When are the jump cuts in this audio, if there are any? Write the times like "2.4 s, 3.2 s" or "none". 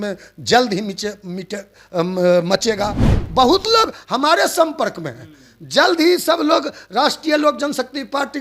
3.1 s

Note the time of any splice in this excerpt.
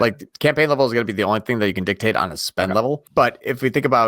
3.1 s

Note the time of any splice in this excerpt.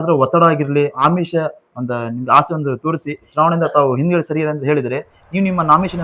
1.0 s, 3.3 s

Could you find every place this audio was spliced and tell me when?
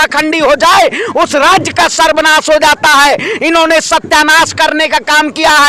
none

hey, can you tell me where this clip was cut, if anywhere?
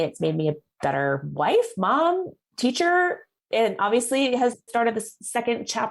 4.6 s

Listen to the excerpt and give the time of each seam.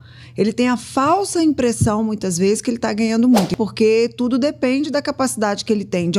3.5 s

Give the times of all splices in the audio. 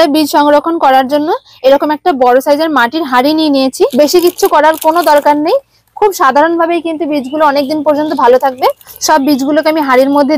3.9 s, 8.9 s

